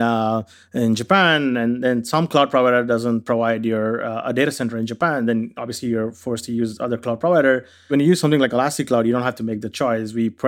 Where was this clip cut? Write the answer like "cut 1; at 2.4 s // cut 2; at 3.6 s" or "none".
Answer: cut 1; at 7.9 s